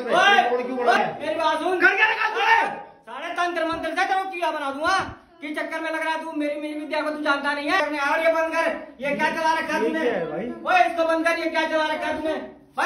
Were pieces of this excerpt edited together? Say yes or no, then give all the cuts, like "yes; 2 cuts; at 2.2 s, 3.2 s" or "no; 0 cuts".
yes; 2 cuts; at 1.0 s, 7.8 s